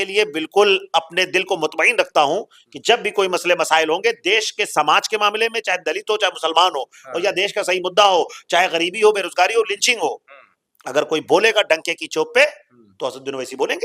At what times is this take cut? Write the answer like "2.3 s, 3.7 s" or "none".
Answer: none